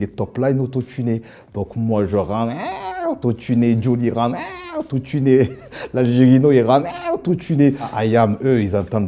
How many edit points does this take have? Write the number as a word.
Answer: zero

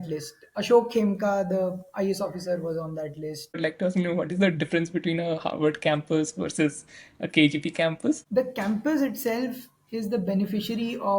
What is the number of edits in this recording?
two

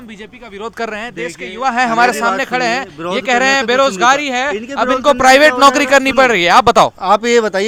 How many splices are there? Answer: zero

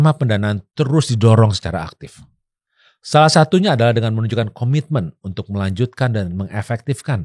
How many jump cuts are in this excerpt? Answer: zero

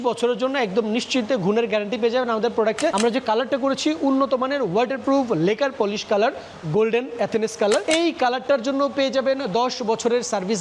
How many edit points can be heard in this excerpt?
two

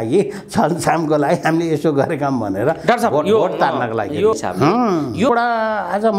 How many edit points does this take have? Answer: two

